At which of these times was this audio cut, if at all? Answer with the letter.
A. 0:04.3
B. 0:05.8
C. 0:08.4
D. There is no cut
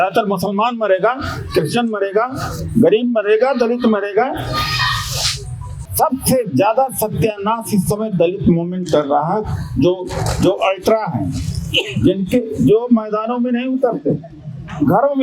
B